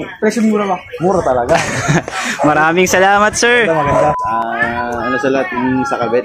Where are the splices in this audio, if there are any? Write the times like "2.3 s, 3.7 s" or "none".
4.2 s